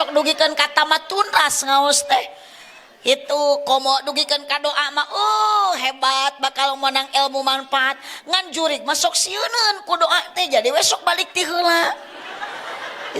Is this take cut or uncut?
uncut